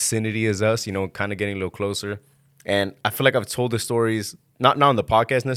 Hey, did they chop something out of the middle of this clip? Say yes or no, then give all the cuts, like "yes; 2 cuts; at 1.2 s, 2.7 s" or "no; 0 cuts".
no; 0 cuts